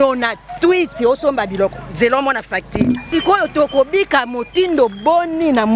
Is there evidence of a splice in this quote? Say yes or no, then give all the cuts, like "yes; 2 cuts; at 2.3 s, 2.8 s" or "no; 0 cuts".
yes; 1 cut; at 3.0 s